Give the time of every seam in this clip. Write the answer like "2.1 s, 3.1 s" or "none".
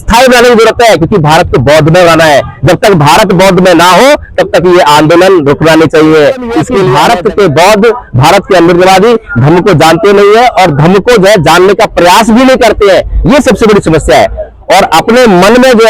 6.9 s